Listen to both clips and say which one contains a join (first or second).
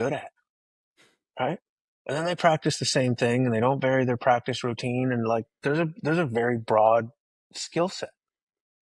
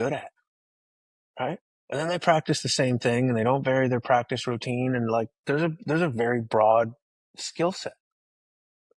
second